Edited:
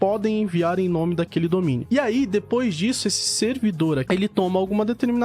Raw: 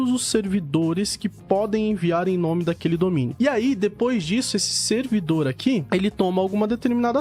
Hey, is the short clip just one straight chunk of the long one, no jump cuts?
no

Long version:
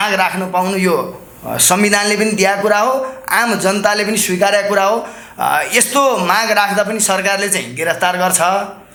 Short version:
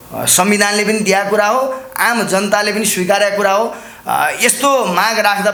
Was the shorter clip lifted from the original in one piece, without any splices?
yes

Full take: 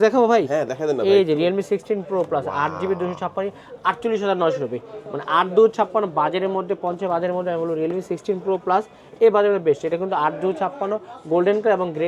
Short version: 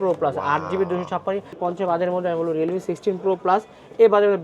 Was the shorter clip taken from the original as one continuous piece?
no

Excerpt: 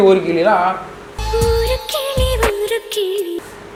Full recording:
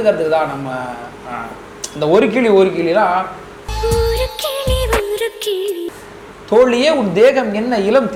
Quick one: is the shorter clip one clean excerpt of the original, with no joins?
yes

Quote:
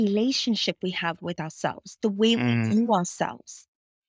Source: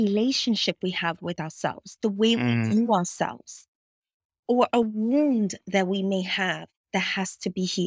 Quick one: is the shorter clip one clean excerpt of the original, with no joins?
yes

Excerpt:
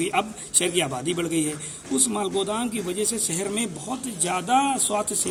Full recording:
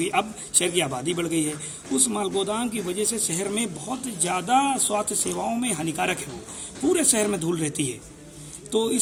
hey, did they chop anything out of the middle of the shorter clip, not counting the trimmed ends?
no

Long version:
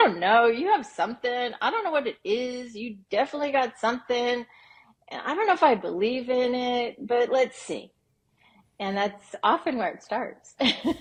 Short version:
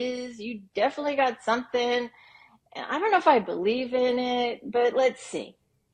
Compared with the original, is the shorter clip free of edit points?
yes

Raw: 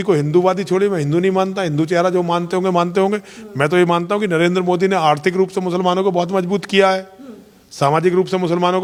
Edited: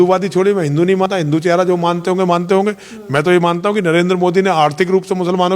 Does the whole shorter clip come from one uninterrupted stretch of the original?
no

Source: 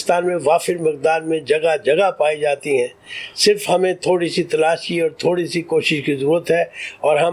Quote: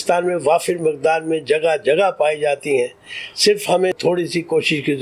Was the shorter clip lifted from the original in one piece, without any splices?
no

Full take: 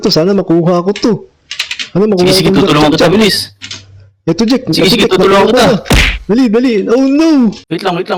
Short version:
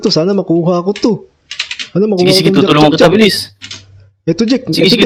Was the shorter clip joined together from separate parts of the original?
no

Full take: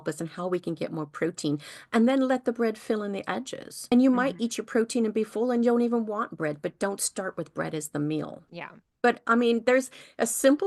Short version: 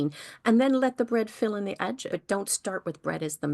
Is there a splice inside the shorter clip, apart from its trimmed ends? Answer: yes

